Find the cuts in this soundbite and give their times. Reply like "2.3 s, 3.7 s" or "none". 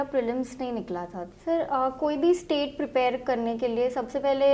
1.2 s